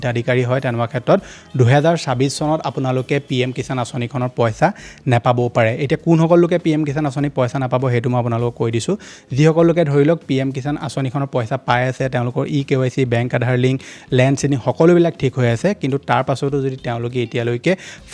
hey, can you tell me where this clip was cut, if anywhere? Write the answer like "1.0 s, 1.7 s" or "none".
none